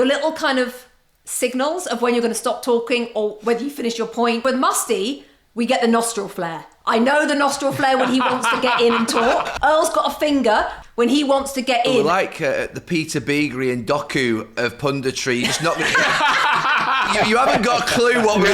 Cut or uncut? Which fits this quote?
cut